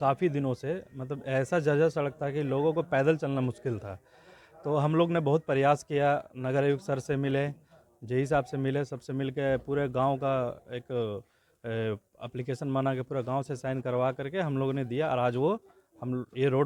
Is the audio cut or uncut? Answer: uncut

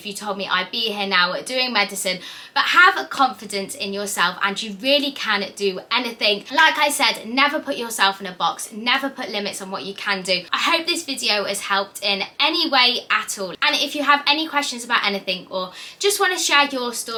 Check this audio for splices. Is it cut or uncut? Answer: uncut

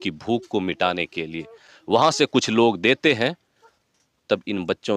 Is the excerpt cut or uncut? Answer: uncut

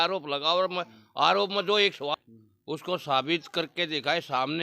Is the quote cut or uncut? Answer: cut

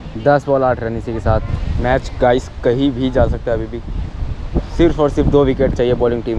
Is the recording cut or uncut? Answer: cut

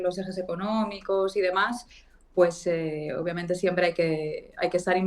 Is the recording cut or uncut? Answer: uncut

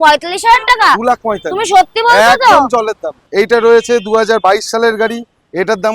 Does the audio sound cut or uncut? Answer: cut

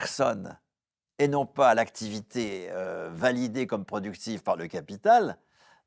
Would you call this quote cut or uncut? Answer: uncut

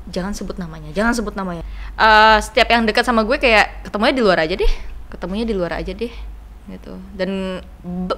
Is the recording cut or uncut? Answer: cut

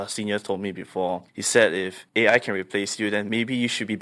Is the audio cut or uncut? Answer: cut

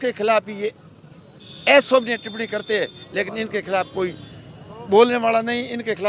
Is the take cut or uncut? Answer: uncut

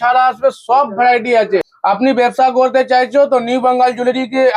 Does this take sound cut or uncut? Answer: cut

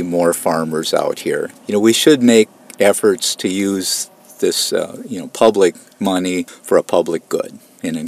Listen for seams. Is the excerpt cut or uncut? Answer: cut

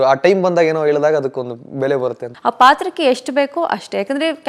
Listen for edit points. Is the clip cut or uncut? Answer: cut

